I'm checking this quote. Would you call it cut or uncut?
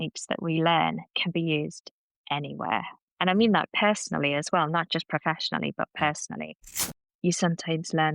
cut